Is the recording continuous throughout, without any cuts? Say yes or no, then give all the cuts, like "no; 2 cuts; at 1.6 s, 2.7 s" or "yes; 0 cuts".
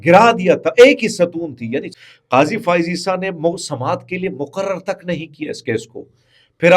no; 1 cut; at 1.9 s